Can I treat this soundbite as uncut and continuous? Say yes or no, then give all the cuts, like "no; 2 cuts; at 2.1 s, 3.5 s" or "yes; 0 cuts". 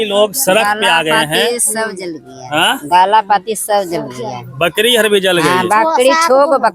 yes; 0 cuts